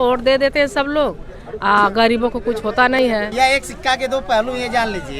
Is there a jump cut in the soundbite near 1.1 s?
no; 1 cut; at 3.1 s

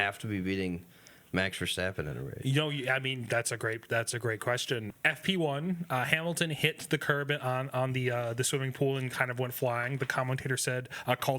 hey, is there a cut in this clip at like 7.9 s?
no; 1 cut; at 4.9 s

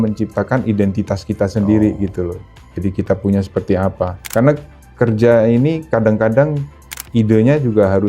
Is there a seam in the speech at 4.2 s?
yes; 1 cut; at 4.2 s

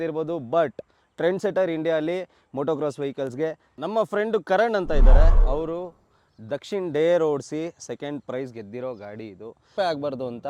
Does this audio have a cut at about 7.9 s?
no; 2 cuts; at 3.7 s, 9.7 s

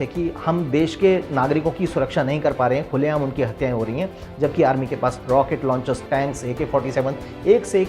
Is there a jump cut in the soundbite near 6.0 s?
yes; 1 cut; at 6.0 s

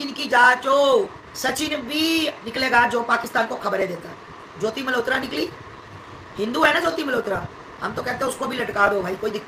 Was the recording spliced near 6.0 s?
no; 2 cuts; at 1.2 s, 2.4 s

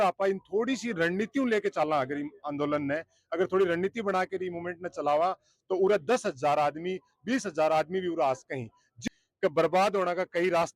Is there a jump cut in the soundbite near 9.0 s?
yes; 1 cut; at 9.0 s

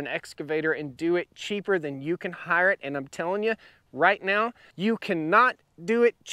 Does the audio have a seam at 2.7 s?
no; 1 cut; at 4.7 s

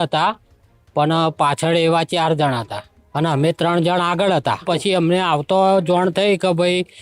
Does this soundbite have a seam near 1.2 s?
no; 1 cut; at 4.6 s

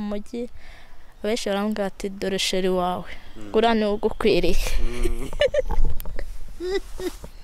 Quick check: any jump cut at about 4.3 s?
no; 0 cuts

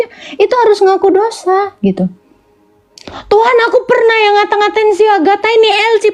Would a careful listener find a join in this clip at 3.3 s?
no; 0 cuts

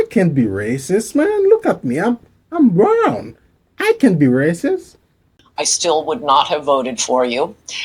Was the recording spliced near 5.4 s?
yes; 1 cut; at 5.4 s

